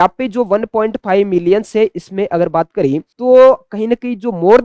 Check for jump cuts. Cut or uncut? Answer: cut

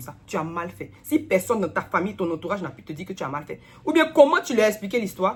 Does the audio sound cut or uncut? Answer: uncut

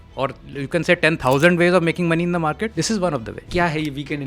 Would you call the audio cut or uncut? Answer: cut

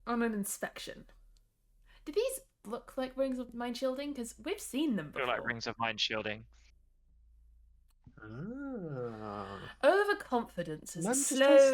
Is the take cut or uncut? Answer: cut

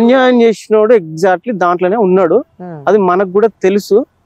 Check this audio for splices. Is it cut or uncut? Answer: uncut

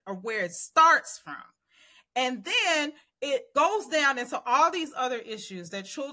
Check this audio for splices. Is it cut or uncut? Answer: cut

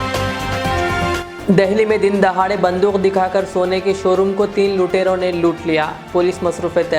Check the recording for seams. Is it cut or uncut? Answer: cut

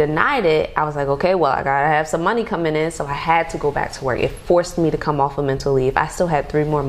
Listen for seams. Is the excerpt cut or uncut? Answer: uncut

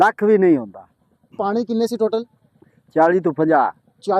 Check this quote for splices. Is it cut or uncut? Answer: cut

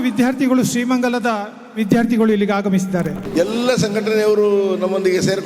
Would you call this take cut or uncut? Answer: cut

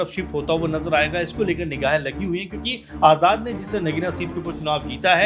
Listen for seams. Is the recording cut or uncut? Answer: uncut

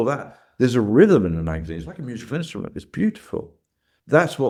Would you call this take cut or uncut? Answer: uncut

